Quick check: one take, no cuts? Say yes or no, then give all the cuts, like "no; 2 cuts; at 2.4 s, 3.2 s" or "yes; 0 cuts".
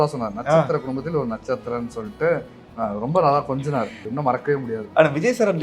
no; 1 cut; at 4.0 s